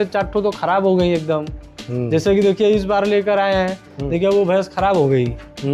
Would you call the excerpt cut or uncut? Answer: uncut